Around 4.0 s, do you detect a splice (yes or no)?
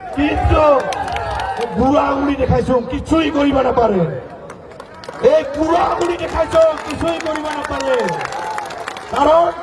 no